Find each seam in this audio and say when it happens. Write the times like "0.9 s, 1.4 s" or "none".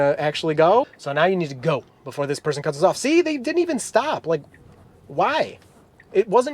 1.0 s